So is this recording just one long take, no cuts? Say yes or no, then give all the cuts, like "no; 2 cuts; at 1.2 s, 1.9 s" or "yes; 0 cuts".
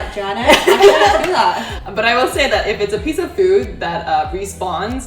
no; 1 cut; at 1.7 s